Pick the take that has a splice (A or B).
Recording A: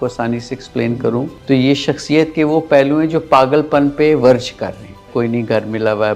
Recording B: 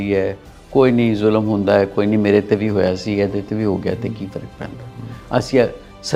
A